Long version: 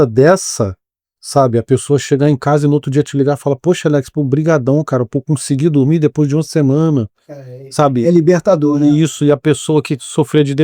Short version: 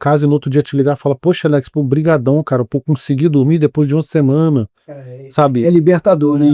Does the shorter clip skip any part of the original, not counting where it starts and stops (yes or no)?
no